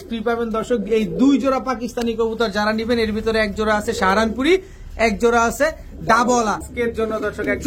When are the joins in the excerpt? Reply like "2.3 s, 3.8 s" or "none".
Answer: 6.7 s